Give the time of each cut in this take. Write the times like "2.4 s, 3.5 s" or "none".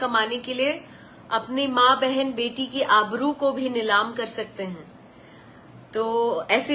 none

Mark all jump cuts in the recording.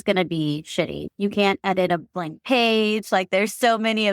1.0 s

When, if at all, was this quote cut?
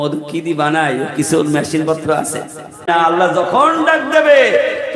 2.9 s

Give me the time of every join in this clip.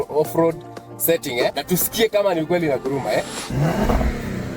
1.6 s, 3.4 s

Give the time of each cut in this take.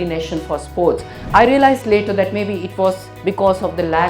1.1 s

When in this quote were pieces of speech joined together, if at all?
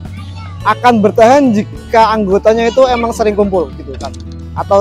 none

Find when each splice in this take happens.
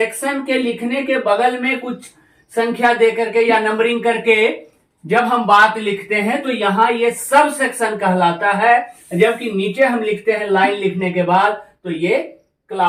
none

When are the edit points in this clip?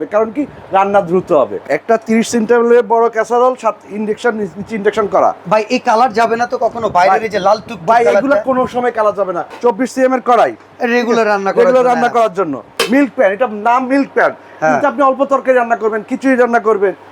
1.6 s, 9.4 s, 12.7 s

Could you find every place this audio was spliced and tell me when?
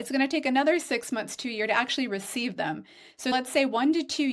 3.3 s

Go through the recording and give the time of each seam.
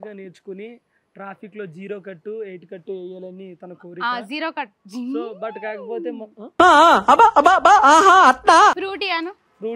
8.8 s

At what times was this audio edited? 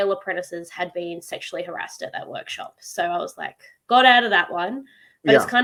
none

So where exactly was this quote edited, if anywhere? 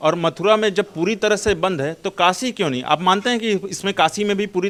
none

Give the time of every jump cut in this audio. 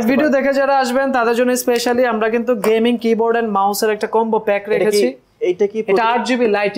none

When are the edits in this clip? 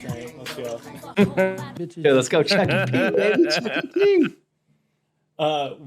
none

